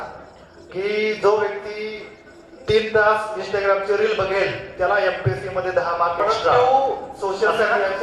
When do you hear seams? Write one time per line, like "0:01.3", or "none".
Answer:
0:06.4